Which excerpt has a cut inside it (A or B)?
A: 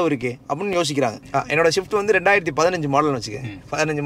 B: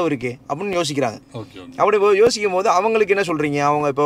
A